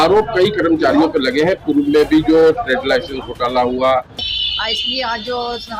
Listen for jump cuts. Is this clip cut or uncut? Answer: cut